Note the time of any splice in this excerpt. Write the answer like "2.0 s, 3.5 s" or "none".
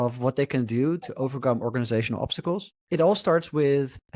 2.7 s